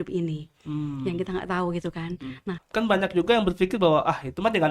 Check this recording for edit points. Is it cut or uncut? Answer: cut